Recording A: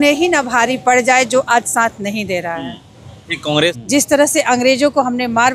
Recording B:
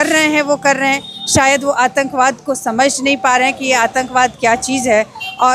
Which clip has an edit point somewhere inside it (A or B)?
A